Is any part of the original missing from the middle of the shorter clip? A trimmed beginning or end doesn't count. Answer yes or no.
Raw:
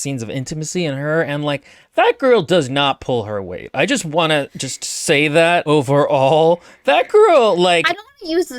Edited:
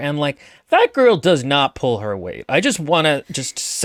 no